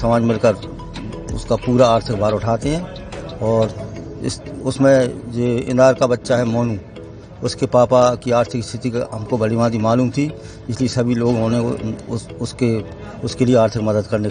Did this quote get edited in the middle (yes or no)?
no